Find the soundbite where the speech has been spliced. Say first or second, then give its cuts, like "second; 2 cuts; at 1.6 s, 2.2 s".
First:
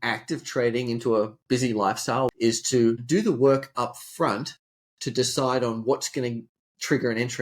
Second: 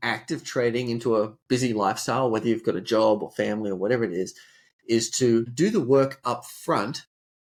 first; 1 cut; at 2.3 s